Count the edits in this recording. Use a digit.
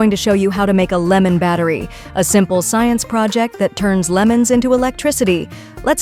0